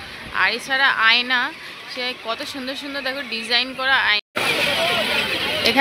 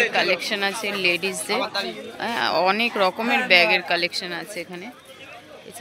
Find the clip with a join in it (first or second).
first